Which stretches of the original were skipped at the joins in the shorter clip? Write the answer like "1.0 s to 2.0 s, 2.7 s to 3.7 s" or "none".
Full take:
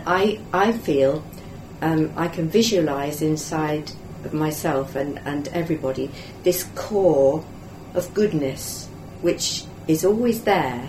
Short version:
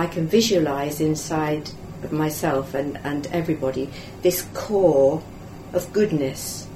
none